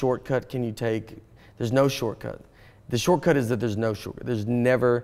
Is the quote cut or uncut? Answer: uncut